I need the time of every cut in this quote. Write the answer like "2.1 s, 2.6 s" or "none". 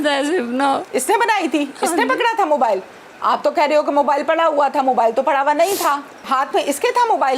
6.2 s